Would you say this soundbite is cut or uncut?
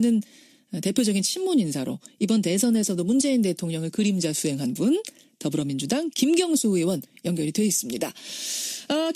cut